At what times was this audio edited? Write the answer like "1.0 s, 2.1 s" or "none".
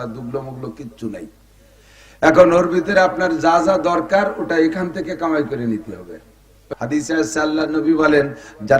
6.6 s